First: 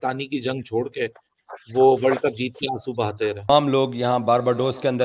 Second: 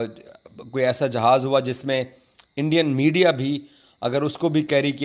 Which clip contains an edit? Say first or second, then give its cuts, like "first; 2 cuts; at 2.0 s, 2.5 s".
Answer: first; 1 cut; at 3.5 s